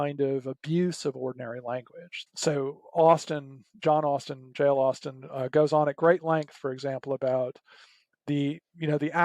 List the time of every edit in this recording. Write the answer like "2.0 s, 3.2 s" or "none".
2.1 s